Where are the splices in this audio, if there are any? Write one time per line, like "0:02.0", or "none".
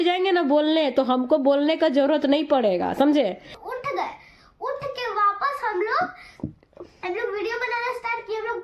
0:03.5